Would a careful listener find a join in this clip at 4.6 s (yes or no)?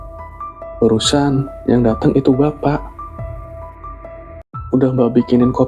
yes